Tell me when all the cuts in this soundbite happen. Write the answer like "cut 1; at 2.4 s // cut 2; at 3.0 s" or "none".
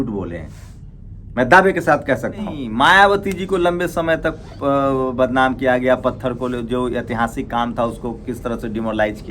cut 1; at 2.6 s

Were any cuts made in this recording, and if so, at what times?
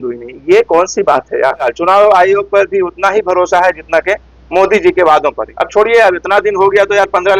cut 1; at 1.7 s // cut 2; at 5.5 s

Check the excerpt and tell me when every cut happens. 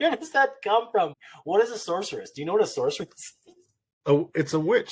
cut 1; at 1.1 s

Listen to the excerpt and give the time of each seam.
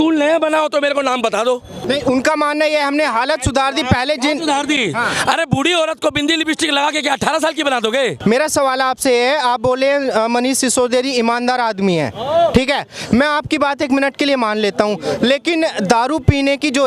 cut 1; at 1.8 s // cut 2; at 8.2 s

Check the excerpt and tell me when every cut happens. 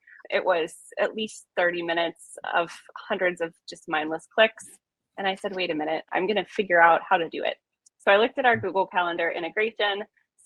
cut 1; at 6.1 s

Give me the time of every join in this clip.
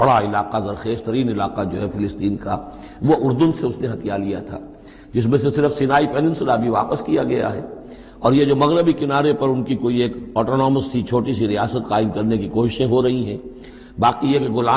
none

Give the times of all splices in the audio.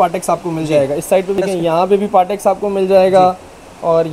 cut 1; at 1.4 s

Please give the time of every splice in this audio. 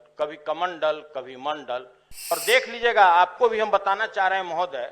cut 1; at 2.4 s

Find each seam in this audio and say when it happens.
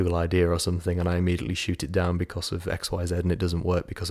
none

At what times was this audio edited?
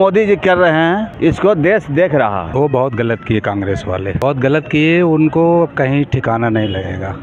cut 1; at 1.1 s // cut 2; at 2.5 s // cut 3; at 4.2 s

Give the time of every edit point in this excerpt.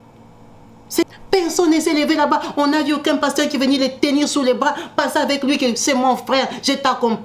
cut 1; at 1.0 s

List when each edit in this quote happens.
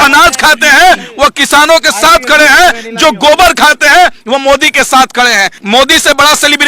cut 1; at 5.5 s

